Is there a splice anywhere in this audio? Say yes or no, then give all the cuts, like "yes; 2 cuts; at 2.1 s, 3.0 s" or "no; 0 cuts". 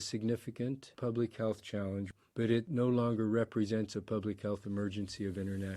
yes; 2 cuts; at 1.0 s, 2.4 s